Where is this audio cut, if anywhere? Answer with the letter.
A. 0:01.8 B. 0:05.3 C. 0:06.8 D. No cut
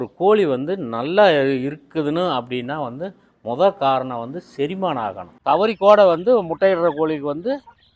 B